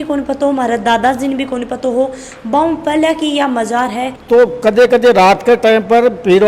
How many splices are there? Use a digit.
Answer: 1